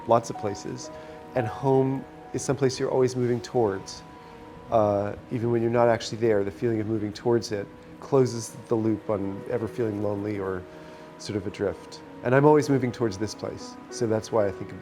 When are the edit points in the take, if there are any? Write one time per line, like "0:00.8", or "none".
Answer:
0:02.4
0:07.9